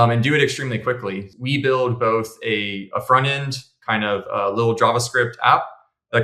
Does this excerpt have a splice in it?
yes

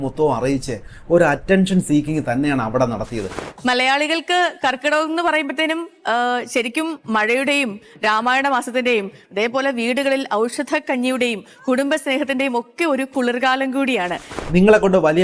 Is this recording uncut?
no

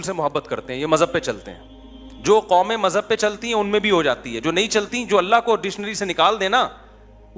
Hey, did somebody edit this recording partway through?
no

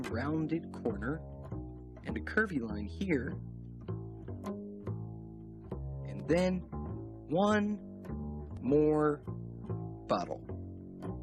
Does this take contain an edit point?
no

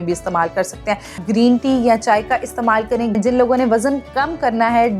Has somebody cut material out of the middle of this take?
yes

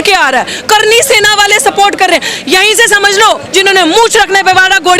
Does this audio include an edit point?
yes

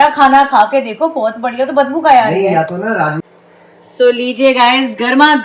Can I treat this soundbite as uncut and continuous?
no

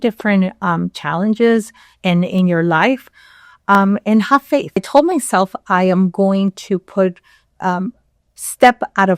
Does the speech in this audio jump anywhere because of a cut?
yes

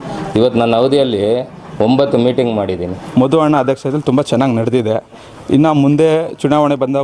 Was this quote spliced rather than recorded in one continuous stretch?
yes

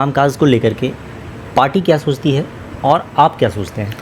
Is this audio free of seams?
yes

